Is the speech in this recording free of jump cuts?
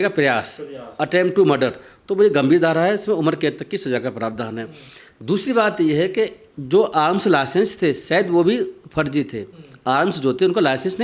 yes; 0 cuts

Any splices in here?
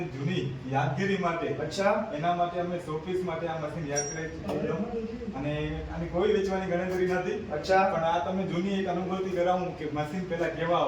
no; 0 cuts

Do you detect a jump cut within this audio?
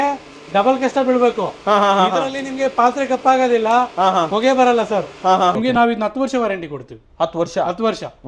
yes; 1 cut; at 5.5 s

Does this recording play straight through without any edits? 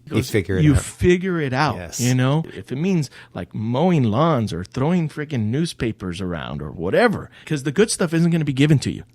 no; 2 cuts; at 2.6 s, 7.4 s

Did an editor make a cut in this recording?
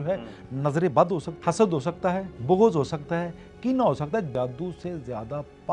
yes; 3 cuts; at 1.3 s, 2.3 s, 4.3 s

